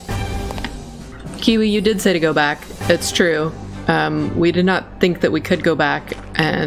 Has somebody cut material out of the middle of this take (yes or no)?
yes